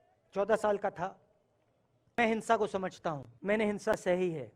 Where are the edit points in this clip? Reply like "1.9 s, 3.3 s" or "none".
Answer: 2.2 s, 3.3 s